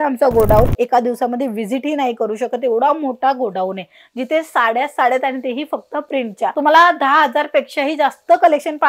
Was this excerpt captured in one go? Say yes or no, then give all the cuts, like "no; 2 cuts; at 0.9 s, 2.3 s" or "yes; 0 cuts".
yes; 0 cuts